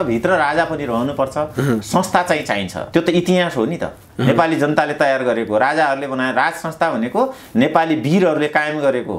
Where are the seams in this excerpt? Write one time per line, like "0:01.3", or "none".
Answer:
none